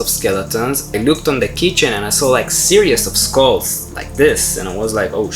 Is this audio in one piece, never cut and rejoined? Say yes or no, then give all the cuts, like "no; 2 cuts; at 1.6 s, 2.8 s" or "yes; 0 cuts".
no; 1 cut; at 0.9 s